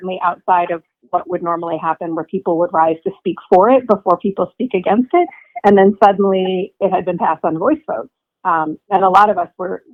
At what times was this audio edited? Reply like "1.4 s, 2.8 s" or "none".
none